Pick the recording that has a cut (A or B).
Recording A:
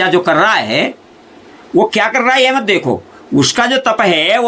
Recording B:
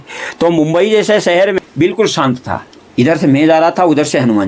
B